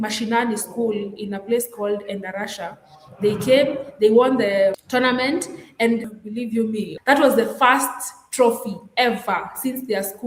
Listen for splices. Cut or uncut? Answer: cut